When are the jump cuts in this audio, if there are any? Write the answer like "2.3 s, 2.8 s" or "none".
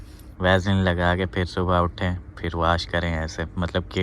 none